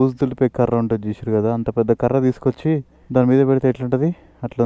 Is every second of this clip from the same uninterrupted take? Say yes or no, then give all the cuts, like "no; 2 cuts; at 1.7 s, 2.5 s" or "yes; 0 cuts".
no; 1 cut; at 2.9 s